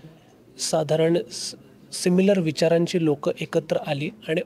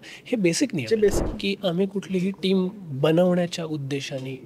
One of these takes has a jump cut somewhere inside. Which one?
second; 1 cut; at 1.2 s

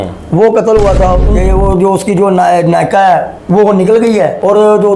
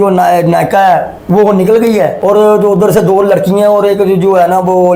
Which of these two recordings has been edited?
first; 1 cut; at 1.3 s

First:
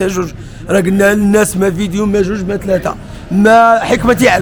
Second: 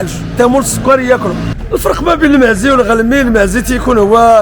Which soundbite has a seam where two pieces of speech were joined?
second; 1 cut; at 1.5 s

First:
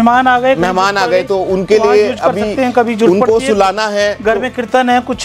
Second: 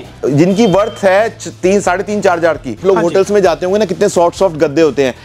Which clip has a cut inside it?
second; 1 cut; at 2.8 s

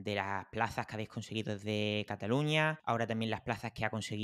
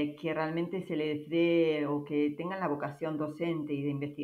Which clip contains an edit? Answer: first; 1 cut; at 2.8 s

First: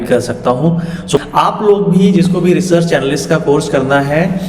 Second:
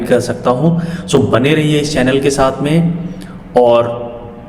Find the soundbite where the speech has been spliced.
first; 1 cut; at 1.2 s

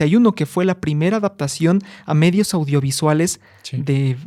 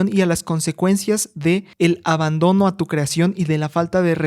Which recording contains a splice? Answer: second; 1 cut; at 1.7 s

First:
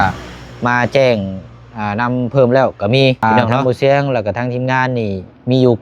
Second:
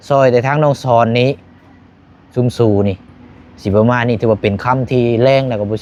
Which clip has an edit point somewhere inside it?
first; 1 cut; at 3.2 s

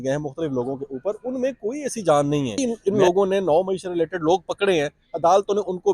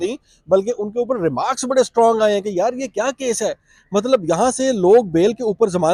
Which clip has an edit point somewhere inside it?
first; 1 cut; at 2.6 s

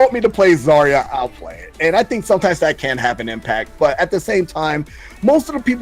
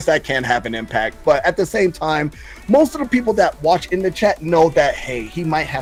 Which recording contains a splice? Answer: first; 1 cut; at 1.1 s

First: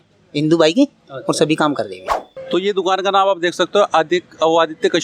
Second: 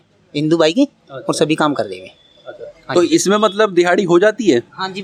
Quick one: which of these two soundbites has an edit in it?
first; 1 cut; at 2.4 s

